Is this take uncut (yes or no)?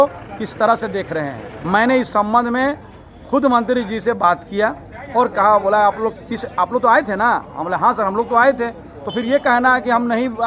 no